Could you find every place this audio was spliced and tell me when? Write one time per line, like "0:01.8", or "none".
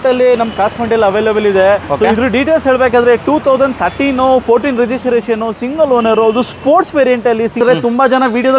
0:07.6